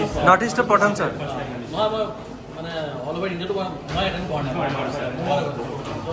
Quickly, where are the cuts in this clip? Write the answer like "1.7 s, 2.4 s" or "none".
none